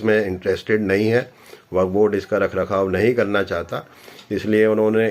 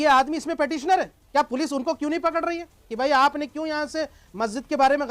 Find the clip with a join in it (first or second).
second